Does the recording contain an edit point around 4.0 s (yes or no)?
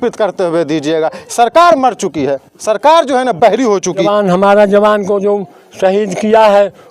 yes